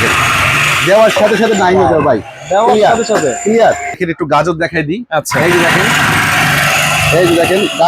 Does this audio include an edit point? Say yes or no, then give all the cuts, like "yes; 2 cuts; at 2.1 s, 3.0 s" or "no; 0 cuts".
yes; 1 cut; at 4.0 s